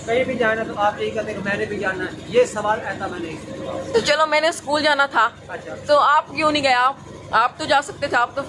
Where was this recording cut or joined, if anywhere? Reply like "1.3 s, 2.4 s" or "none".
3.9 s